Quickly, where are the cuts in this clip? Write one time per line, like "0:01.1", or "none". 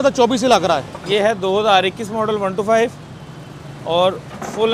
0:01.0